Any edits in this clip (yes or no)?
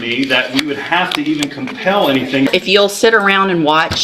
yes